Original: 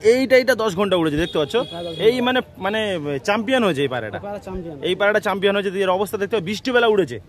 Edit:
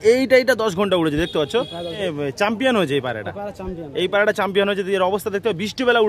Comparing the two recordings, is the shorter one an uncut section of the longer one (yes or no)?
no